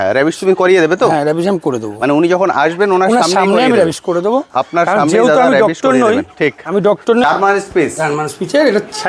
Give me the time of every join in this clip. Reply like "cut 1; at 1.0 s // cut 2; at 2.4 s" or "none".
cut 1; at 7.2 s